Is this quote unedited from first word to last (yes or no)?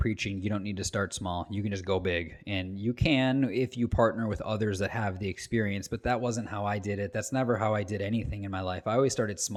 yes